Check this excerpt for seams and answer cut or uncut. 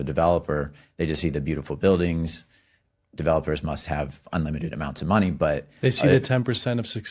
uncut